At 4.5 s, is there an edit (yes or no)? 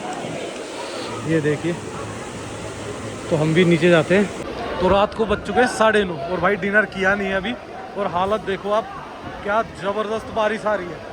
yes